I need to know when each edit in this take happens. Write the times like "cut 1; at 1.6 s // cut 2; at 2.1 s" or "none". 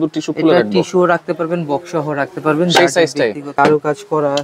cut 1; at 3.5 s